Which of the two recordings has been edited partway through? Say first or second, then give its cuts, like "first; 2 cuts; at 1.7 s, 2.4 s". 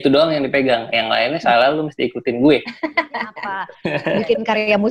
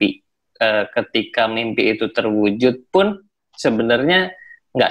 first; 1 cut; at 3.7 s